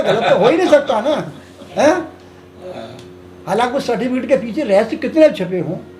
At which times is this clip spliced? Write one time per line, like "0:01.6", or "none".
none